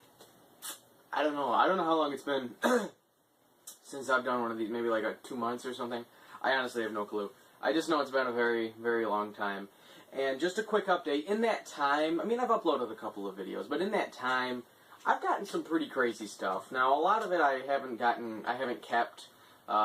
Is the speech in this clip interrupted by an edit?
yes; 1 cut; at 4.5 s

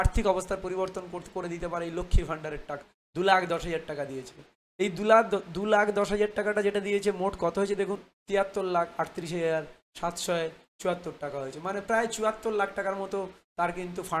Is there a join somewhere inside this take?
yes; 2 cuts; at 2.9 s, 8.1 s

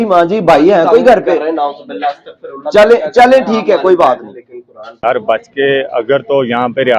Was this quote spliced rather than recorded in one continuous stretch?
yes; 1 cut; at 5.0 s

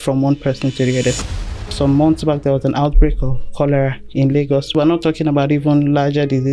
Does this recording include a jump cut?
yes; 2 cuts; at 1.2 s, 4.7 s

